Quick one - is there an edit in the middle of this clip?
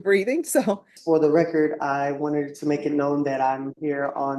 yes; 1 cut; at 0.9 s

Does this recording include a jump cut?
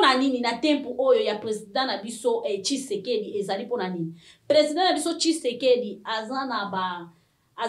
no; 0 cuts

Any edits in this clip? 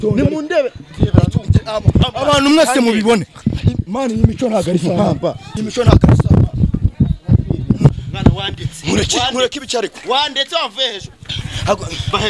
yes; 2 cuts; at 5.4 s, 7.9 s

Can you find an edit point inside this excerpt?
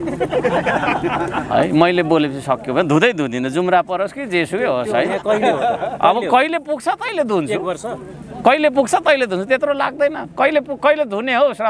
no; 0 cuts

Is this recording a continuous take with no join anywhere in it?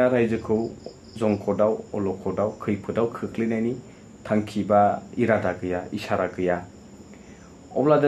yes; 0 cuts

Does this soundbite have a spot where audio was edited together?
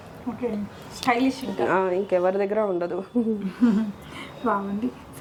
no; 0 cuts

